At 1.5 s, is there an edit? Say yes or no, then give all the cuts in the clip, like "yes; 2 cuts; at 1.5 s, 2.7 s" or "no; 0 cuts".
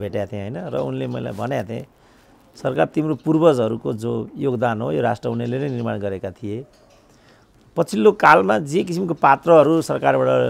no; 0 cuts